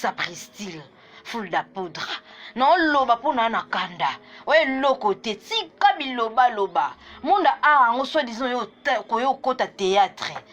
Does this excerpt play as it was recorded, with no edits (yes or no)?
yes